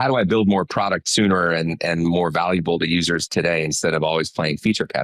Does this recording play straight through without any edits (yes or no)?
yes